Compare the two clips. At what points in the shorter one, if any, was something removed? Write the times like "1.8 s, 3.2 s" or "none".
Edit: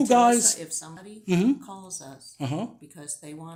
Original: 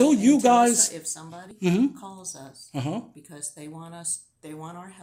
none